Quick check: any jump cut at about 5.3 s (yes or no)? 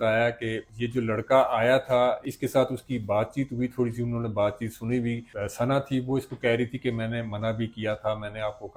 no